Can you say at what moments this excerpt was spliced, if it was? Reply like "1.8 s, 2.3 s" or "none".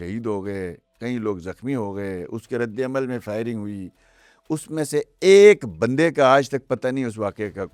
none